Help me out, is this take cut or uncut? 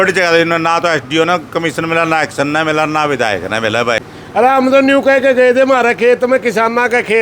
cut